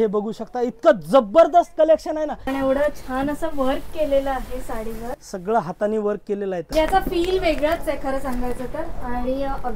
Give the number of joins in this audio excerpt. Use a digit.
2